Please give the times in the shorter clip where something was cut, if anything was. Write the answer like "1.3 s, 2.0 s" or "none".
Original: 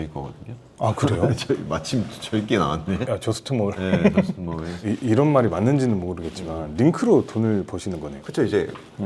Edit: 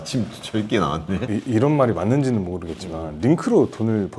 1.2 s